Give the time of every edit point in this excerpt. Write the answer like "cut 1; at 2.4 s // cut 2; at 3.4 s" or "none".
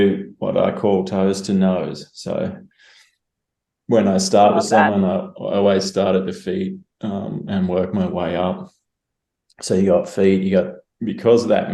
none